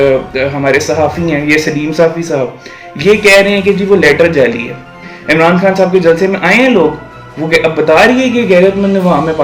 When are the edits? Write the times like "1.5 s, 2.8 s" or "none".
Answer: 5.1 s

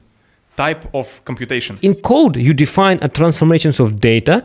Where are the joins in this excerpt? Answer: 1.8 s

